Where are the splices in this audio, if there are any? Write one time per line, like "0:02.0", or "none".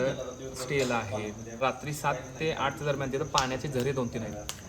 0:01.5